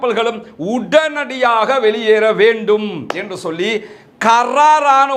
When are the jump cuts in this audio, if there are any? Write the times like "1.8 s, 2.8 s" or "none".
none